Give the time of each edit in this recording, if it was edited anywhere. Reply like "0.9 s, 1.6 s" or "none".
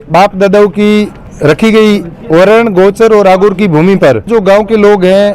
1.2 s, 4.3 s

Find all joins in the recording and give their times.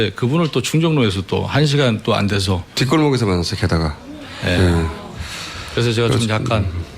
6.1 s

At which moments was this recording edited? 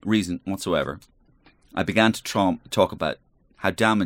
none

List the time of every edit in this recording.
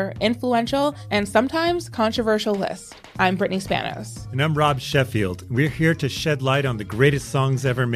none

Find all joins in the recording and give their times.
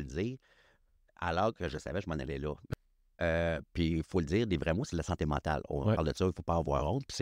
2.7 s

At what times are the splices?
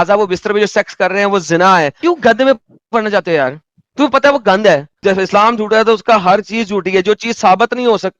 2.0 s, 4.9 s

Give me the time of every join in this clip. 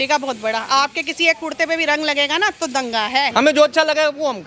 3.3 s

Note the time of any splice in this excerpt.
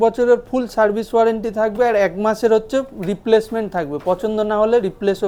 none

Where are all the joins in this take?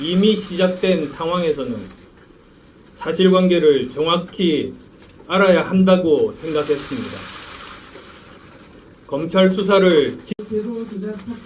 none

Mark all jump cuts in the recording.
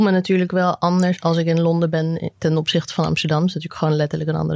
1.2 s

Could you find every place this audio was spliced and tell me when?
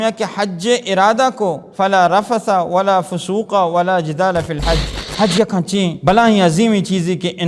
1.7 s, 5.0 s, 6.0 s

